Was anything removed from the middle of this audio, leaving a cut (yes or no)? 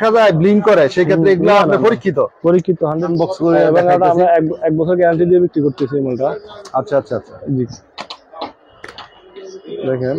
yes